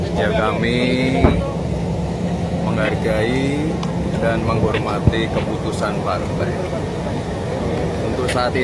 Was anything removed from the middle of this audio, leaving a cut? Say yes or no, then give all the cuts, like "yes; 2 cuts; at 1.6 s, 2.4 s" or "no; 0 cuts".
no; 0 cuts